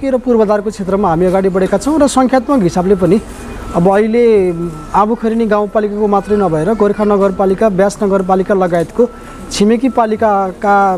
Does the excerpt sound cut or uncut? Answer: uncut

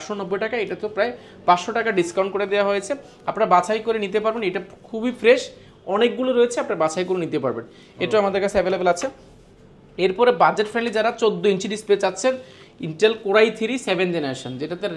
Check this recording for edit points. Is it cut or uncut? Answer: uncut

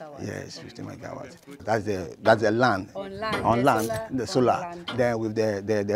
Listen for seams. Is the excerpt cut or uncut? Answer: cut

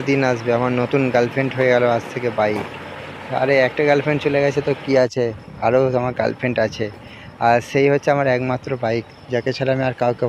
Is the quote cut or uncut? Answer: uncut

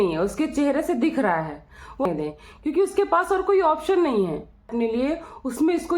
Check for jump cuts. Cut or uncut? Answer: cut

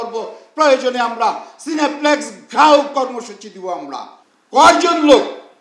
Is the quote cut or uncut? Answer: cut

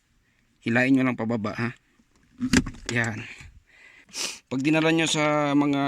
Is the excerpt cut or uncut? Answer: cut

